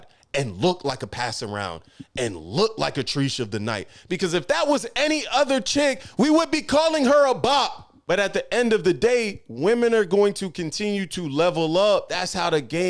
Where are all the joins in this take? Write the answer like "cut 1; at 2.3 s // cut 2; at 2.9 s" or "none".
cut 1; at 7.9 s